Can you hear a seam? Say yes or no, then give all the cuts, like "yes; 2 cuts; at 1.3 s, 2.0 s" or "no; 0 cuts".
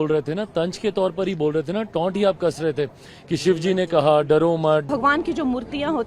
yes; 1 cut; at 4.9 s